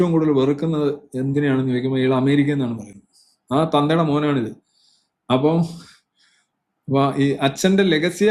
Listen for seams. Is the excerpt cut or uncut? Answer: uncut